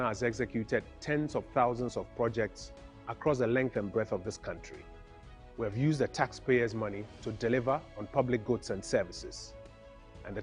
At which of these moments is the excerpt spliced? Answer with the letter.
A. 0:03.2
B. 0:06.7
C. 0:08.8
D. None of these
C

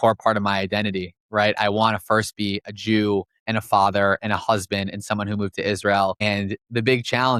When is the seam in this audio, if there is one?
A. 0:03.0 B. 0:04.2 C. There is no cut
C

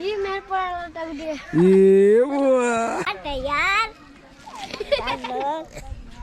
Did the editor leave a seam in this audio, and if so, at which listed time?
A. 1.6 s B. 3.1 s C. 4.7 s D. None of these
B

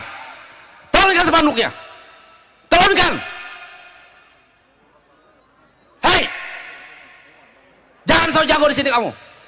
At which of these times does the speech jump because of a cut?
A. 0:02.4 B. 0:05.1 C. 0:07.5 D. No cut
D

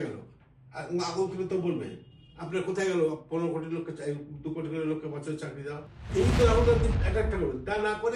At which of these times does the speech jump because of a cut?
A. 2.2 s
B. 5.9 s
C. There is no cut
B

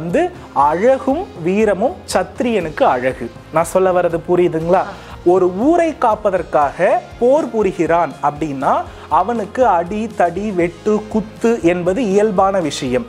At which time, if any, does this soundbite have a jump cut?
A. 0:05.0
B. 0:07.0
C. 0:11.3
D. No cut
A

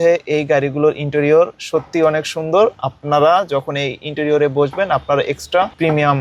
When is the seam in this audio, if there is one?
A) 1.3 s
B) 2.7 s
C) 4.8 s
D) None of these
D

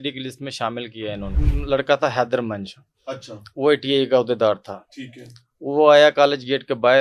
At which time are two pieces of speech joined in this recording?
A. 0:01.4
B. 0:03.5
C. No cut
A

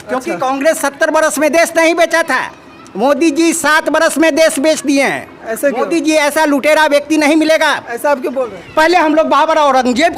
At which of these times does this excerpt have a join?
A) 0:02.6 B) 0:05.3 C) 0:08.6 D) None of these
C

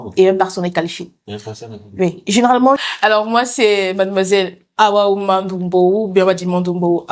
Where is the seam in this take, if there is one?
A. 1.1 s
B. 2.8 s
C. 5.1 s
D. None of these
B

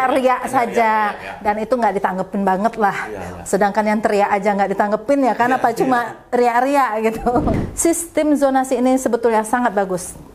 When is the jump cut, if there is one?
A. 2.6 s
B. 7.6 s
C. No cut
B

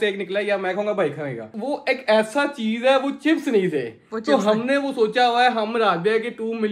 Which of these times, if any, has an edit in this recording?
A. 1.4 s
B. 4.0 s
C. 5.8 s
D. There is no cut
A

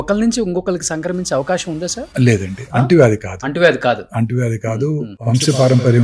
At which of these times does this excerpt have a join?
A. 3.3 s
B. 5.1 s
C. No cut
B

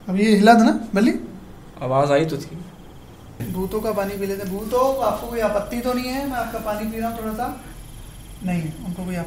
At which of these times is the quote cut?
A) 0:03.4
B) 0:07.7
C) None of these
A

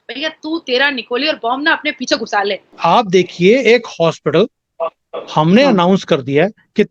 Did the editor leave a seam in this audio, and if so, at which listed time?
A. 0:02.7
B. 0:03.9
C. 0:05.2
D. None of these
A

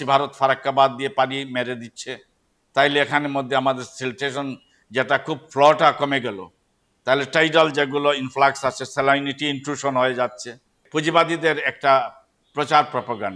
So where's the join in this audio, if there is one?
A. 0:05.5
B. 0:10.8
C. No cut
B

